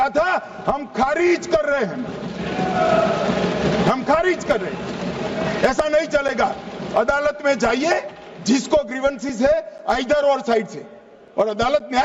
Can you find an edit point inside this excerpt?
no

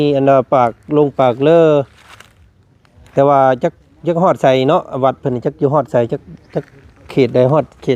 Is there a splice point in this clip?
no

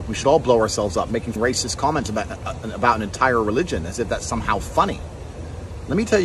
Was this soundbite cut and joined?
yes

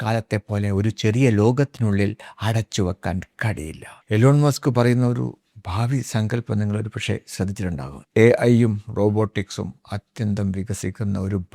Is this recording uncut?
no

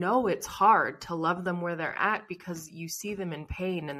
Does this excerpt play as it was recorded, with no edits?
yes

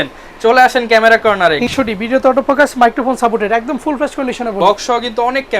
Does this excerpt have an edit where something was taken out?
yes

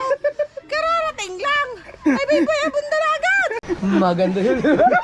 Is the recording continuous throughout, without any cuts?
yes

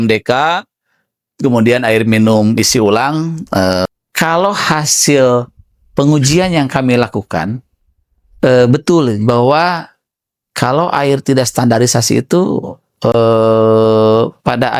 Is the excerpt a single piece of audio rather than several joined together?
no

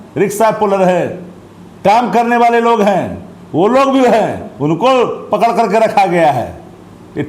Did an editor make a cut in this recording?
no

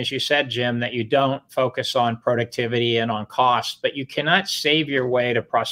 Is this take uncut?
yes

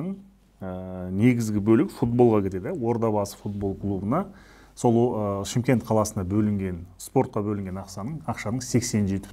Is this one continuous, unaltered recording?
yes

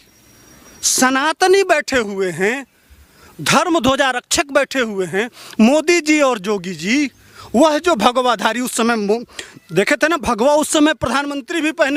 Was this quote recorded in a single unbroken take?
yes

